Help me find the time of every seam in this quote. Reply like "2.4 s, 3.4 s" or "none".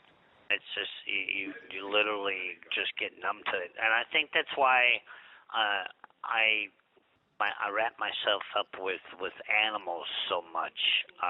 7.2 s